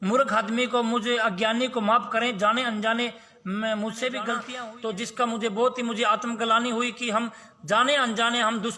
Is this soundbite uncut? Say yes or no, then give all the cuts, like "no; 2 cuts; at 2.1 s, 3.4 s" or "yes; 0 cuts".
no; 1 cut; at 4.5 s